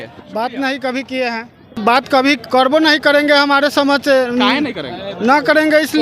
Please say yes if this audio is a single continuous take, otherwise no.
no